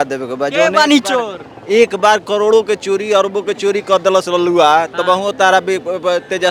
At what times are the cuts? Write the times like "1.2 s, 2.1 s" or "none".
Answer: none